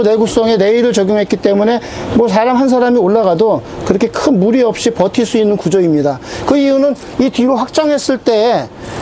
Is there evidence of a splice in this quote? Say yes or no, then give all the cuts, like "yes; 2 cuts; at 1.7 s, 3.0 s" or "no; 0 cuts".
no; 0 cuts